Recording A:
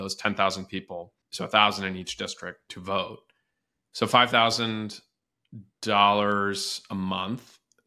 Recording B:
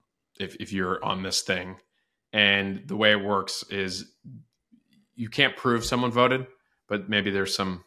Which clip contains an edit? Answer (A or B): A